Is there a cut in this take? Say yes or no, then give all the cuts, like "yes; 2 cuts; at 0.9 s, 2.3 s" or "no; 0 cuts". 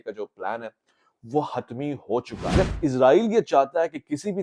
yes; 1 cut; at 2.6 s